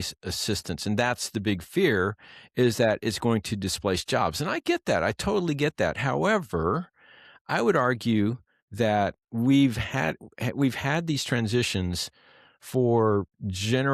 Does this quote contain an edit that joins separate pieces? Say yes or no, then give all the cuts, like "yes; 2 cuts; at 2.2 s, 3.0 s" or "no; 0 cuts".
no; 0 cuts